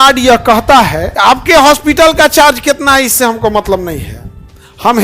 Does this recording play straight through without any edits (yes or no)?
no